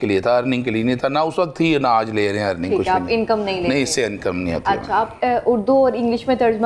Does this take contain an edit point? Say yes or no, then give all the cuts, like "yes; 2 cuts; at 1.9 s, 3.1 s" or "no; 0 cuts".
no; 0 cuts